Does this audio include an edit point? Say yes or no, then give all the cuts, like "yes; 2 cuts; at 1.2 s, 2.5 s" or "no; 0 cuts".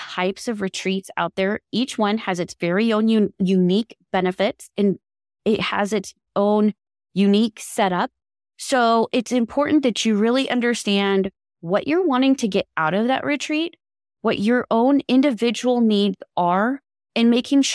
no; 0 cuts